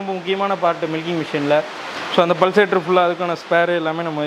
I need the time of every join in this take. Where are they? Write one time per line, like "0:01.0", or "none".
none